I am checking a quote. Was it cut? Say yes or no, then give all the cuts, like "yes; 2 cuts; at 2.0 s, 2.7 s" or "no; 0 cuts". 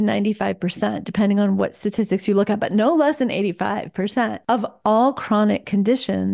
yes; 1 cut; at 4.4 s